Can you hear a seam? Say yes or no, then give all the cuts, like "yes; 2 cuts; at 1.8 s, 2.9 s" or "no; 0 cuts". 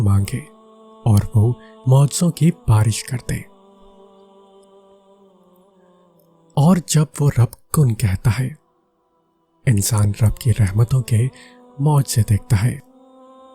yes; 2 cuts; at 3.5 s, 6.5 s